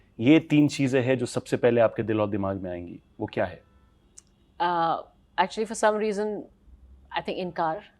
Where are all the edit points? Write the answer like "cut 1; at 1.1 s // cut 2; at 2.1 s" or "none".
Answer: none